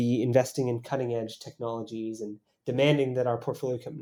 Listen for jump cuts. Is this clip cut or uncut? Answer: uncut